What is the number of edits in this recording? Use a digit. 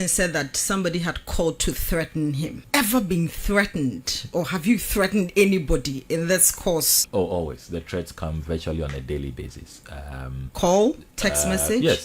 2